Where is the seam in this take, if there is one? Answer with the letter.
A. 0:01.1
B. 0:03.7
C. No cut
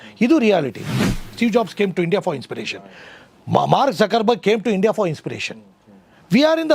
A